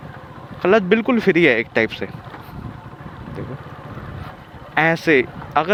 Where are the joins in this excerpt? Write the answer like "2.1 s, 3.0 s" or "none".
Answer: none